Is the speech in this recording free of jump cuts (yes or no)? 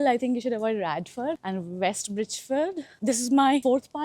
no